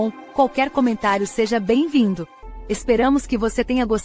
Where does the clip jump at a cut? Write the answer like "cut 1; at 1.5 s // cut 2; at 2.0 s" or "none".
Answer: cut 1; at 2.3 s